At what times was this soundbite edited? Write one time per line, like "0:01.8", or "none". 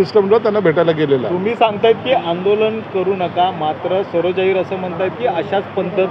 none